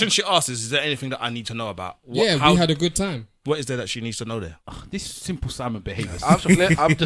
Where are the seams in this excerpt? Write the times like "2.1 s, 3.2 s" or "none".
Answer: 3.3 s